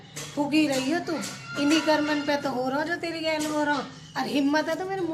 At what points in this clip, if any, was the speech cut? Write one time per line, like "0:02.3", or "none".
none